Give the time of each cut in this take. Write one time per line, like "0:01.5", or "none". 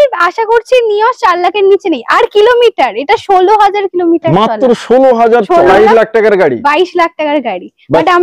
0:05.7